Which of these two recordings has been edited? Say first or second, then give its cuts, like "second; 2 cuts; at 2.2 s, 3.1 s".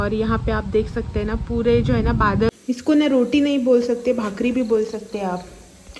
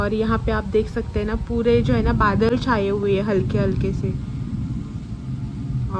first; 1 cut; at 2.6 s